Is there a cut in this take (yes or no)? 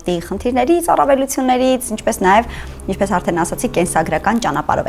no